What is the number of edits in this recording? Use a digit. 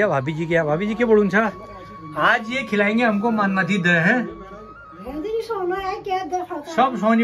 0